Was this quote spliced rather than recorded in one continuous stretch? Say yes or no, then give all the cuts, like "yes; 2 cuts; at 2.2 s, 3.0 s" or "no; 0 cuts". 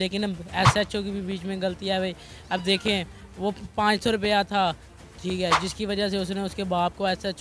no; 0 cuts